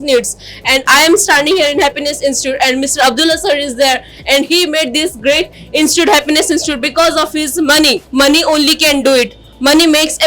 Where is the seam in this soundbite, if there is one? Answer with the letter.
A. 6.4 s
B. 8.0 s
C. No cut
B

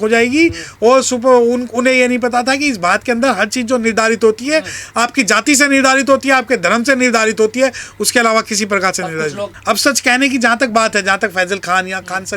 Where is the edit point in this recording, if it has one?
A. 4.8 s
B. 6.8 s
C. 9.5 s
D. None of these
C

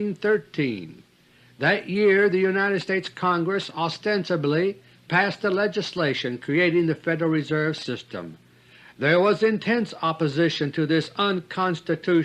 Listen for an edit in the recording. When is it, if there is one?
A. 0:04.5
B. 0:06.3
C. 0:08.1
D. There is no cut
B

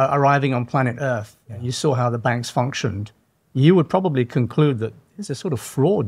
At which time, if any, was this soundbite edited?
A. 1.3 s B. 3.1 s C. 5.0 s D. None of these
D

